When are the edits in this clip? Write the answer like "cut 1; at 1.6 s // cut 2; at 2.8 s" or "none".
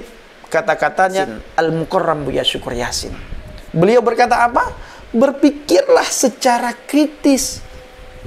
cut 1; at 1.2 s